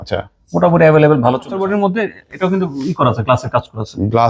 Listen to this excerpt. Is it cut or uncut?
cut